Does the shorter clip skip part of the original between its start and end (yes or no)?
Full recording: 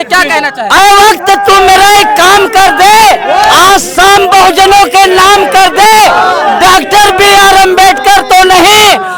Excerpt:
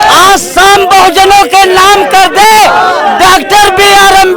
no